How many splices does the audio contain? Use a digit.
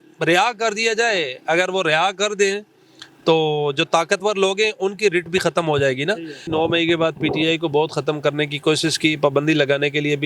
1